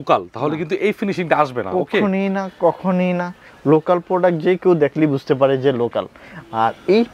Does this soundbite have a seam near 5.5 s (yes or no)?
no